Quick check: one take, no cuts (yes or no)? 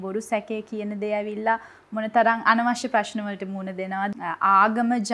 no